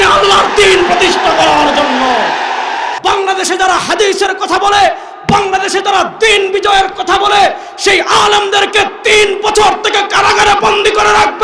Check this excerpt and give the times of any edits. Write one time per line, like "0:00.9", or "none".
0:02.9